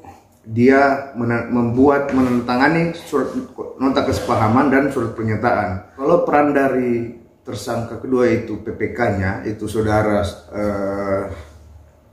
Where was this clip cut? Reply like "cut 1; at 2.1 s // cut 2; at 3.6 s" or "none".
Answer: cut 1; at 5.9 s